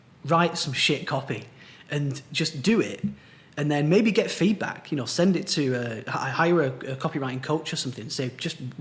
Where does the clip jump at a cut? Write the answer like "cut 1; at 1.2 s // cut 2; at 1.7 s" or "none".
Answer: none